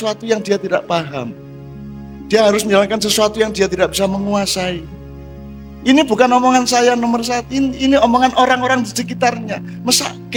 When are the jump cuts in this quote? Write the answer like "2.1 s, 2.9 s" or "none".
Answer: none